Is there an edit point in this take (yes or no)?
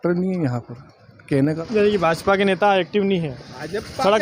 yes